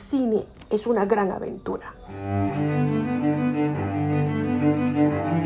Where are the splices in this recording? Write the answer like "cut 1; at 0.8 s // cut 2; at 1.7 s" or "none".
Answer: cut 1; at 2.0 s